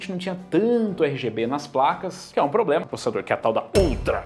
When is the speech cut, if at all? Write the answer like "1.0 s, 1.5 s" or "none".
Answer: 2.8 s